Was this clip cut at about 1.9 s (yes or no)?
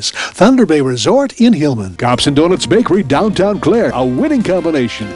yes